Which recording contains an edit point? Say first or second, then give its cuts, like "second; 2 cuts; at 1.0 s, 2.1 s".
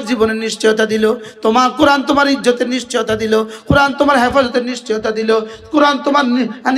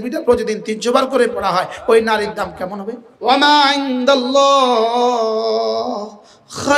second; 1 cut; at 3.1 s